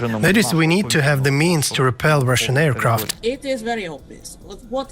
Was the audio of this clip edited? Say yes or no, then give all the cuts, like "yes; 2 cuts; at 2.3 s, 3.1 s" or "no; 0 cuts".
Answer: yes; 1 cut; at 3.1 s